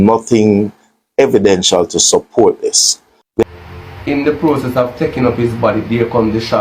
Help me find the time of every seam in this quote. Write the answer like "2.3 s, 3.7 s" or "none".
3.4 s

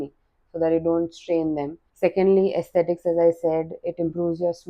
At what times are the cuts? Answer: 1.8 s

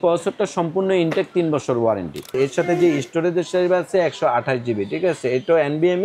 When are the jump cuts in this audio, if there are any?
2.3 s

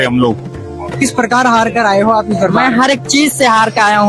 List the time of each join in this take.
0.9 s

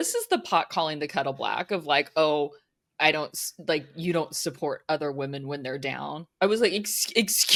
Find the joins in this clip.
none

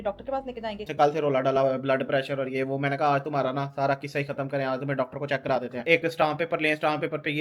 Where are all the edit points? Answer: 0.9 s, 5.8 s

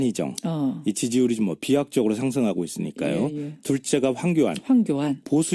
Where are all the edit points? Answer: none

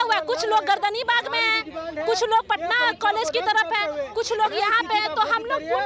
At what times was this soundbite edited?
none

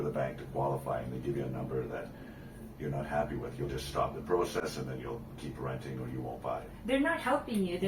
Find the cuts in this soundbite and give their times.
none

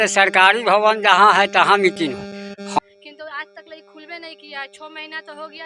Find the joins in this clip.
2.8 s

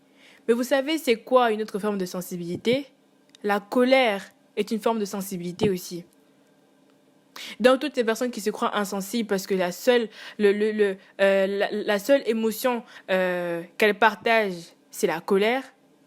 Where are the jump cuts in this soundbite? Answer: none

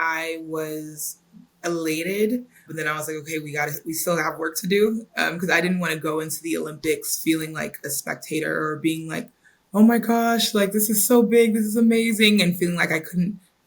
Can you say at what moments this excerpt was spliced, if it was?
2.7 s

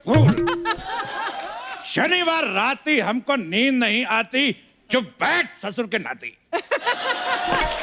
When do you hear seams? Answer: none

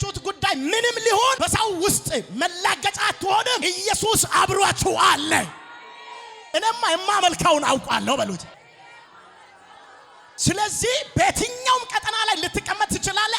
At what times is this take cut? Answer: 6.5 s

